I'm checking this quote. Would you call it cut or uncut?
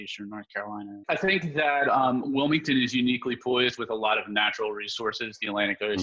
cut